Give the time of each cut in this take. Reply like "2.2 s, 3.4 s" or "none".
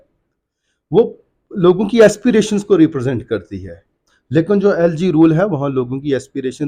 none